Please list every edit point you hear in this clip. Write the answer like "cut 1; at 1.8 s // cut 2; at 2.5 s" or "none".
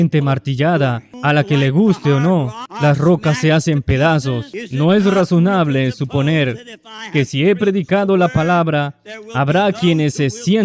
cut 1; at 1.1 s // cut 2; at 2.6 s // cut 3; at 4.6 s